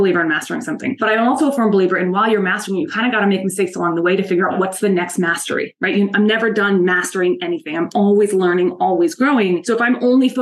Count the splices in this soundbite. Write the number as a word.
three